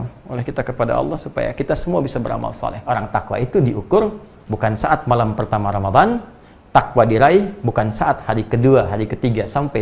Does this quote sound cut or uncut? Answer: cut